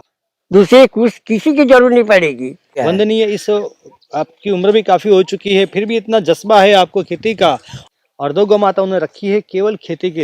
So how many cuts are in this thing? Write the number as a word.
two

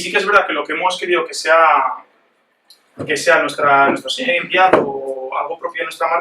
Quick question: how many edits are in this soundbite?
one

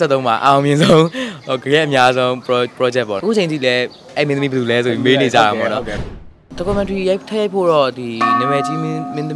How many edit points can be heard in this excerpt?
two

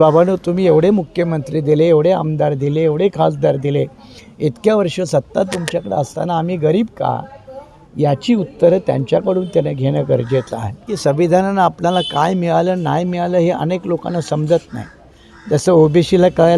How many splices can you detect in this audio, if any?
one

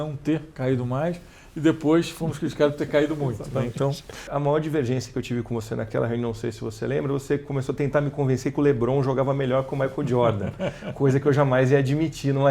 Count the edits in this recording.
one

